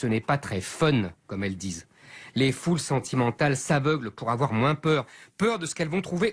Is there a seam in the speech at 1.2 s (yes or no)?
no